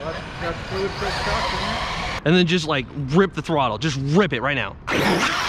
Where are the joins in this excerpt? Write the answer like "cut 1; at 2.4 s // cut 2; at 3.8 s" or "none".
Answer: cut 1; at 2.1 s